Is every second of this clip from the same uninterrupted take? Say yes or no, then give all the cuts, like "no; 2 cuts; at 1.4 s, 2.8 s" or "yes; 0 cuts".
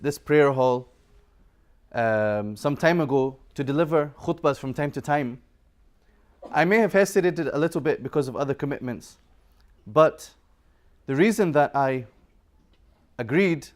yes; 0 cuts